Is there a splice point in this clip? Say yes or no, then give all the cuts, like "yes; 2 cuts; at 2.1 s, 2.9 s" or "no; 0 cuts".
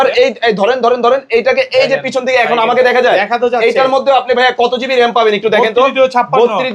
no; 0 cuts